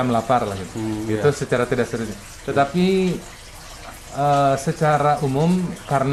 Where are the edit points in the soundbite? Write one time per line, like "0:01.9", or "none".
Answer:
none